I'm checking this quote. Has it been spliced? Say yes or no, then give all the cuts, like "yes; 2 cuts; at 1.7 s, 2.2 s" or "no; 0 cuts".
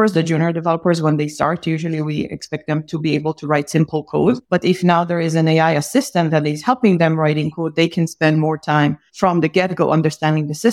yes; 2 cuts; at 4.4 s, 9.1 s